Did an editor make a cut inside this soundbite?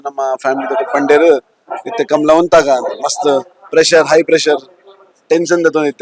no; 0 cuts

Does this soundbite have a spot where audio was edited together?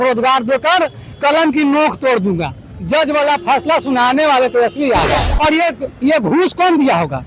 yes; 1 cut; at 5.2 s

